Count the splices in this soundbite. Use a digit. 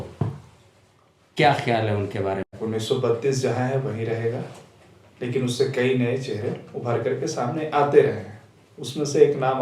1